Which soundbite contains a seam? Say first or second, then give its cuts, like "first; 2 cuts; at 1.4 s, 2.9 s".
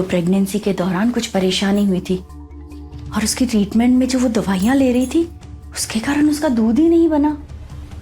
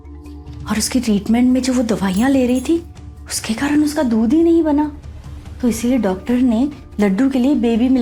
first; 1 cut; at 1.2 s